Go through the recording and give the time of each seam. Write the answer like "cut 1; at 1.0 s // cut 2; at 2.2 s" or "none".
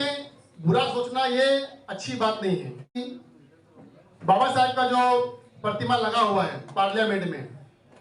cut 1; at 3.2 s